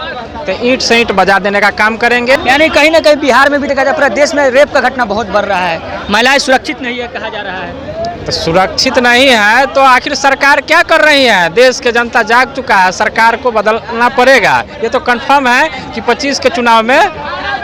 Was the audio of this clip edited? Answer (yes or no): no